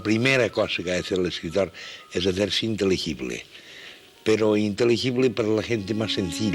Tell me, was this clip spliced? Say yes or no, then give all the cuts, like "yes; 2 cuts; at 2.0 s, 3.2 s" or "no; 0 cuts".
no; 0 cuts